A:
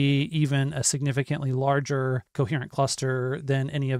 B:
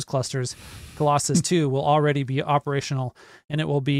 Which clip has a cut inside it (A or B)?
A